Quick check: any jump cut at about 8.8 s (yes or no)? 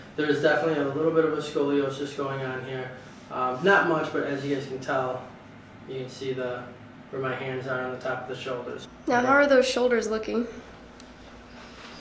yes